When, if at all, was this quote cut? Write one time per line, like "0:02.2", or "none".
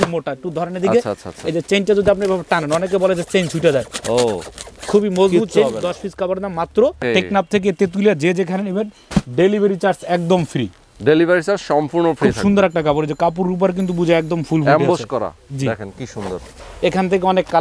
0:07.0
0:16.5